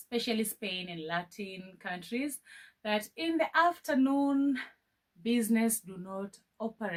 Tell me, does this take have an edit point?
no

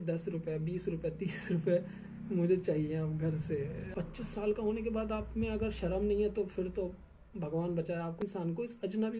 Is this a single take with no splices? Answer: no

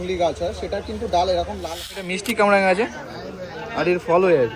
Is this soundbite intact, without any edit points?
no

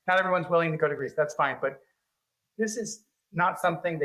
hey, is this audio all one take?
yes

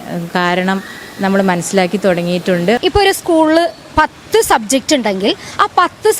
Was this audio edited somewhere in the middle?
yes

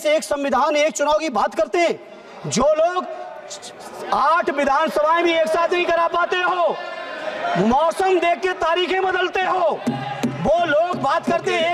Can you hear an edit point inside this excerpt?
no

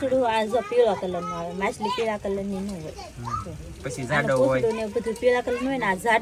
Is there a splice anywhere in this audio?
no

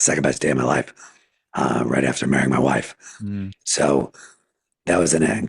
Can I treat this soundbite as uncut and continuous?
yes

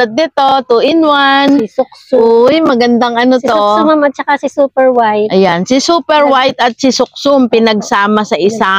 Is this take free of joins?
yes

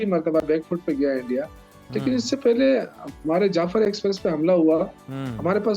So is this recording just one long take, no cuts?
yes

